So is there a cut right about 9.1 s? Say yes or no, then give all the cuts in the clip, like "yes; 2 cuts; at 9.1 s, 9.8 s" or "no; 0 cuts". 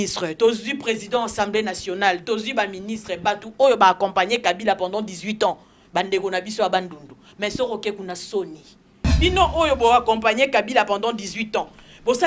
yes; 1 cut; at 9.1 s